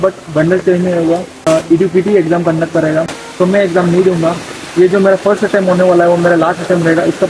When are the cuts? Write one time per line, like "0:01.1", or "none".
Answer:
0:01.5
0:03.2